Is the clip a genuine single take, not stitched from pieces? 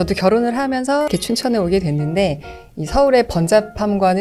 no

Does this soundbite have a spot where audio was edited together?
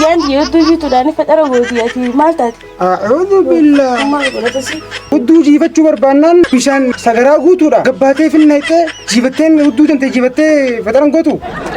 yes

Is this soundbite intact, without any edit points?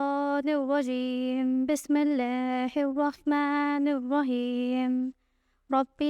yes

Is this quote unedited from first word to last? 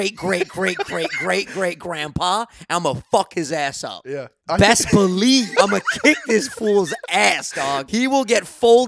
no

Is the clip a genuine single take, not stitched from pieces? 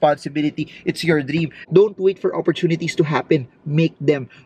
no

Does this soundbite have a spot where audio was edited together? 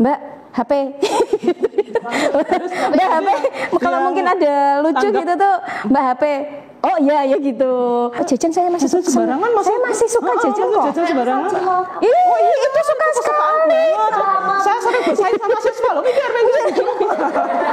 yes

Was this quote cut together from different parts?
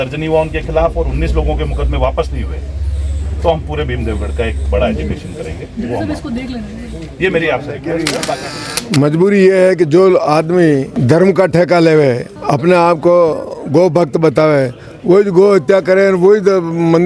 yes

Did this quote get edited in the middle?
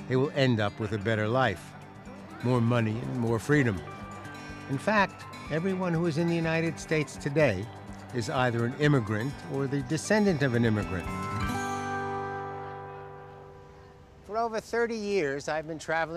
no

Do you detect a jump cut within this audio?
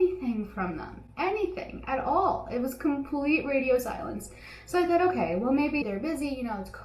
no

